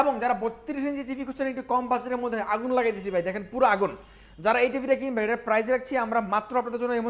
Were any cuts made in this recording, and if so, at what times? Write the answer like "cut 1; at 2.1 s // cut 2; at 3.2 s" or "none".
none

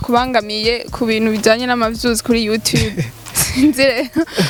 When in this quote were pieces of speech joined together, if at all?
none

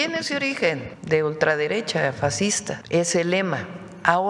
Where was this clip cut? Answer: cut 1; at 0.9 s // cut 2; at 2.7 s

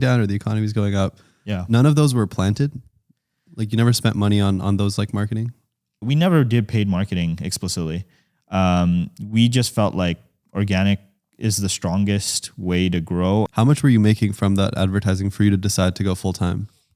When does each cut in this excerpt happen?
cut 1; at 6.1 s // cut 2; at 13.5 s

